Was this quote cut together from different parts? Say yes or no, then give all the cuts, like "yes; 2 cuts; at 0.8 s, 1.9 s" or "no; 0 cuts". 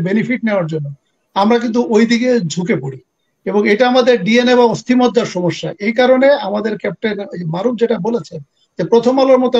no; 0 cuts